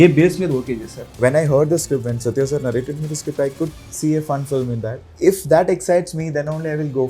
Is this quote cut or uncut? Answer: cut